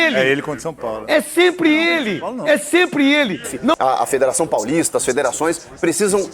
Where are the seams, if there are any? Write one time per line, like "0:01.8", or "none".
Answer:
0:03.7